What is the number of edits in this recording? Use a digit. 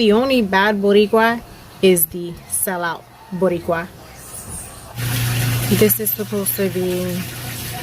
1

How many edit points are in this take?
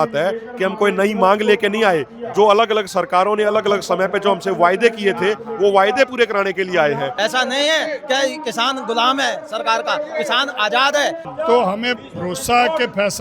2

